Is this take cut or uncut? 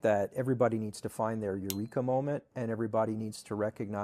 uncut